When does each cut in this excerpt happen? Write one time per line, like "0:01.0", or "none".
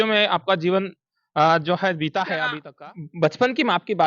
0:02.6